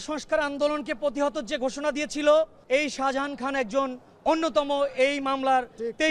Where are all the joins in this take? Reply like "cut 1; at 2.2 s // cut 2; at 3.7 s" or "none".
cut 1; at 2.6 s